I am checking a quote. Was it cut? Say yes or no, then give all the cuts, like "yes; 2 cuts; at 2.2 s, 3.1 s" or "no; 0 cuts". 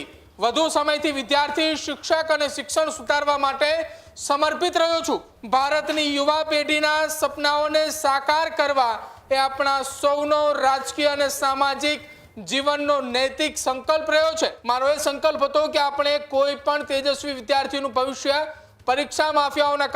yes; 2 cuts; at 5.3 s, 14.6 s